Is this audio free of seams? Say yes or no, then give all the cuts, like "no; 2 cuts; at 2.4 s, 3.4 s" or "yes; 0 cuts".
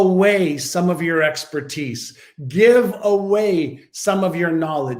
yes; 0 cuts